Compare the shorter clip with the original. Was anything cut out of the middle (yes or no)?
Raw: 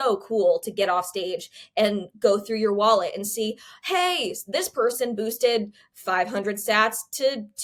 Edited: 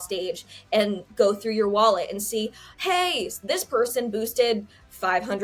no